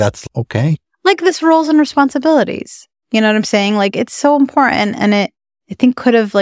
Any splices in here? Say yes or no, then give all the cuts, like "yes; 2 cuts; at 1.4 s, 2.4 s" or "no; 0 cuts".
no; 0 cuts